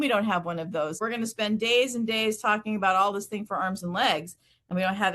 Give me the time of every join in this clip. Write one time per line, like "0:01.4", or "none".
0:01.0